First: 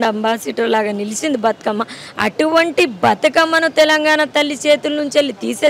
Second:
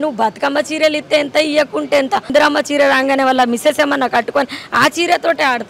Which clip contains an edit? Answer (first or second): second